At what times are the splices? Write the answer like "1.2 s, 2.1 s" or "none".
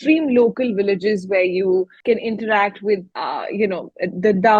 1.9 s, 3.1 s